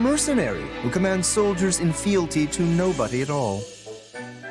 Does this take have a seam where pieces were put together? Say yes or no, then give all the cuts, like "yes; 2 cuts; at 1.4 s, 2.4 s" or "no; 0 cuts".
yes; 1 cut; at 3.6 s